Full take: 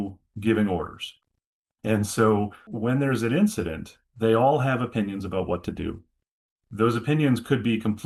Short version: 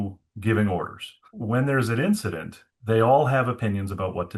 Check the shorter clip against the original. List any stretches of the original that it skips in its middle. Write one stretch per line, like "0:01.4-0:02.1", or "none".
0:01.3-0:02.6